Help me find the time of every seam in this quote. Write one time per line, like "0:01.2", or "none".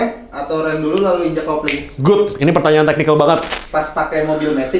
0:03.6

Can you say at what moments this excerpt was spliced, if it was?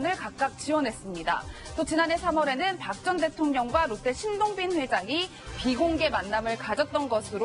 0:04.0

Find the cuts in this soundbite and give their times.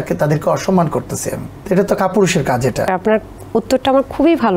0:01.5
0:02.9

